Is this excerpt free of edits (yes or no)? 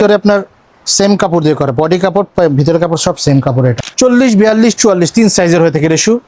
no